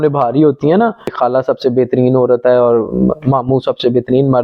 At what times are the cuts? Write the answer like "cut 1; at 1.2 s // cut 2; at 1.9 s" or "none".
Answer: cut 1; at 1.0 s